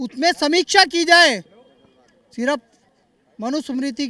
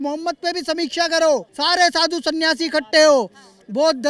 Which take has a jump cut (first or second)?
second